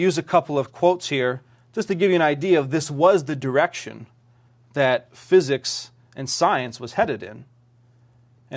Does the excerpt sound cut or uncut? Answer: uncut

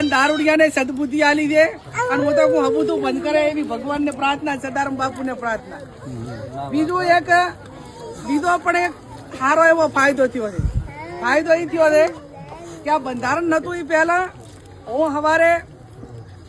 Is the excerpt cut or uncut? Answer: uncut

